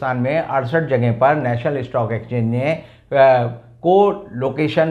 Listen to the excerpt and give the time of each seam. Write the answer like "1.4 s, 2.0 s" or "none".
none